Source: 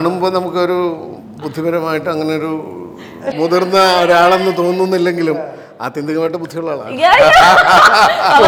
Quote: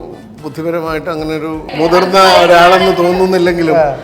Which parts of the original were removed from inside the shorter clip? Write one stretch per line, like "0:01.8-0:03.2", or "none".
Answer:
0:02.7-0:03.3

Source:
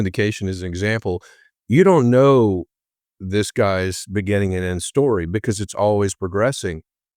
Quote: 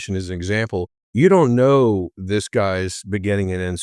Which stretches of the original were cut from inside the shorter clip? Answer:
0:01.3-0:01.5
0:02.7-0:03.2

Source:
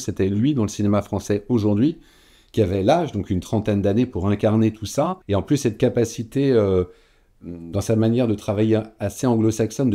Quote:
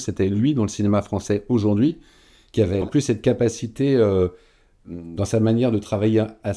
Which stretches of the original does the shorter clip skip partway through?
0:02.8-0:05.4

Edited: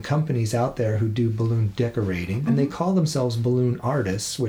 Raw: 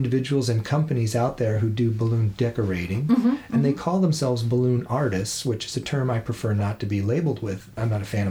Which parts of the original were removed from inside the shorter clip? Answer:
0:03.0-0:03.4

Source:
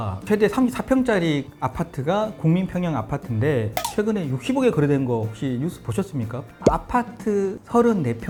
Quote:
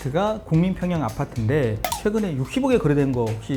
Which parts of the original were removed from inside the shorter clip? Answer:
none

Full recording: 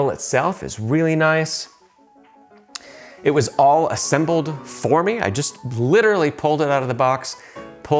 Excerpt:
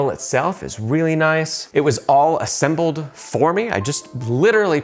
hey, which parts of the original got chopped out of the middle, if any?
0:01.6-0:03.1

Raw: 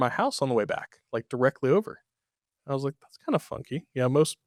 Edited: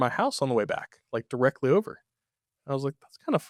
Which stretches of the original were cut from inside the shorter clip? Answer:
none

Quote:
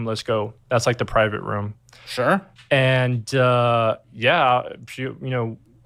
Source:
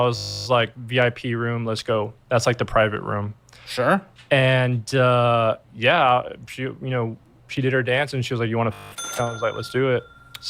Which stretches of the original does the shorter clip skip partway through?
none

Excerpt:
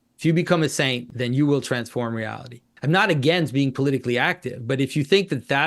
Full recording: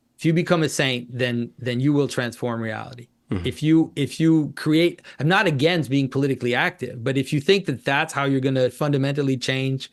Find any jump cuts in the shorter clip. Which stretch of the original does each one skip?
0:01.1-0:01.6
0:03.2-0:05.1

